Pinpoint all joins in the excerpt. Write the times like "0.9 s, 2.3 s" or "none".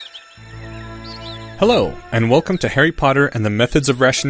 1.5 s